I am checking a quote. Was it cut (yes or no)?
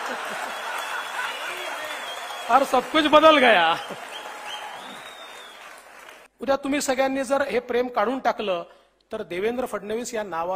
yes